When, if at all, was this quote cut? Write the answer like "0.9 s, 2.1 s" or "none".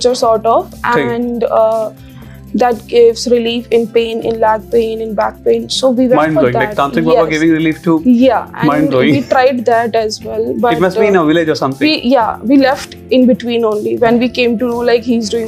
none